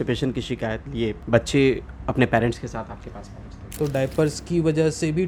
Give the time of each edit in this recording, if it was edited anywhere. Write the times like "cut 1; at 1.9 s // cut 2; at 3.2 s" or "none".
cut 1; at 1.2 s // cut 2; at 3.7 s